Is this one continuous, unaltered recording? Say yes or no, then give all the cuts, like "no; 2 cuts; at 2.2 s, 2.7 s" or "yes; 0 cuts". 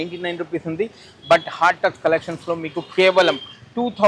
yes; 0 cuts